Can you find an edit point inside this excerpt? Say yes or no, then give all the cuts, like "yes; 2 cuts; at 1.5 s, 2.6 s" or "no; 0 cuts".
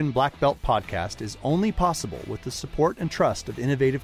no; 0 cuts